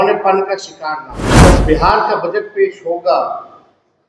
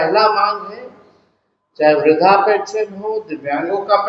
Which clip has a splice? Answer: first; 1 cut; at 1.4 s

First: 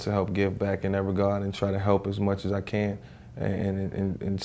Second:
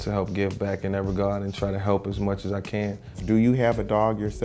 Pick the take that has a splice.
second; 1 cut; at 3.1 s

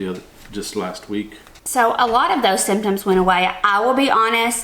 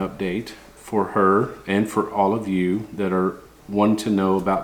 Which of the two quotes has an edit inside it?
first; 1 cut; at 1.5 s

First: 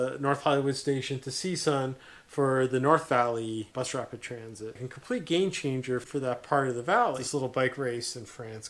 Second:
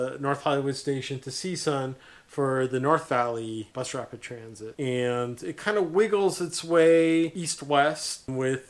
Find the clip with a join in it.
first; 3 cuts; at 4.7 s, 6.1 s, 7.2 s

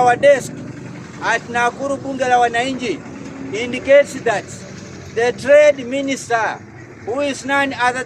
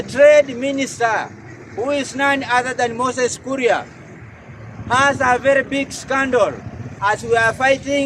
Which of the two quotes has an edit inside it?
second; 1 cut; at 6.9 s

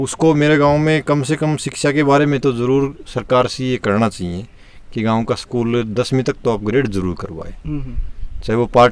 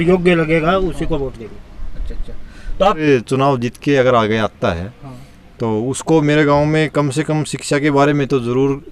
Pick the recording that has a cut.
second; 1 cut; at 3.0 s

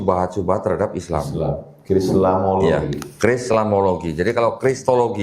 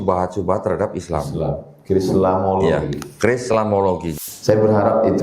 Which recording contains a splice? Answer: second; 1 cut; at 4.1 s

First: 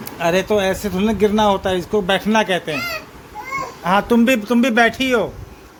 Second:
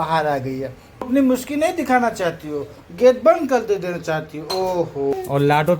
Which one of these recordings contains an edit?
second; 2 cuts; at 1.1 s, 5.1 s

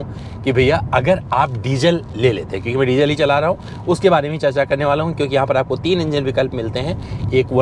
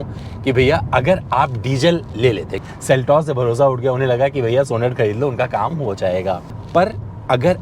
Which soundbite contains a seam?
second; 2 cuts; at 2.5 s, 6.5 s

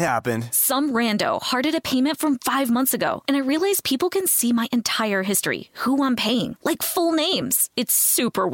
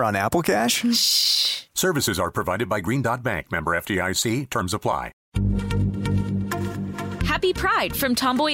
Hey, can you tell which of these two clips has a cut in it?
second; 1 cut; at 5.2 s

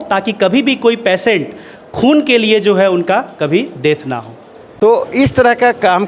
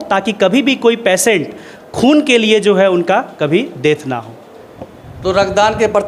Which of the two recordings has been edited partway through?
first; 1 cut; at 4.6 s

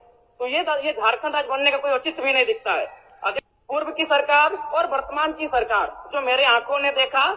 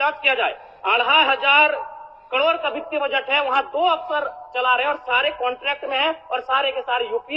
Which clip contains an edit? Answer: first; 1 cut; at 3.3 s

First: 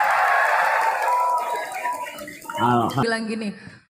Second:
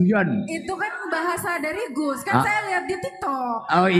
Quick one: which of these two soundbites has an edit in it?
first; 1 cut; at 3.0 s

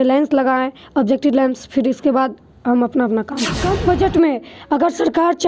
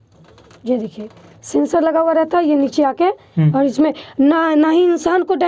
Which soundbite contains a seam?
first; 1 cut; at 3.6 s

